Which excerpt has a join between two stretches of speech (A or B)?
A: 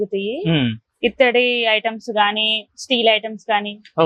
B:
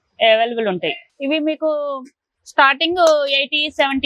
B